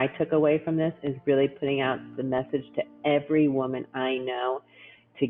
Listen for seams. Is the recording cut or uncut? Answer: uncut